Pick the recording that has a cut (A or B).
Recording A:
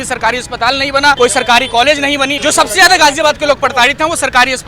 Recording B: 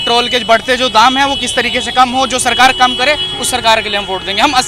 A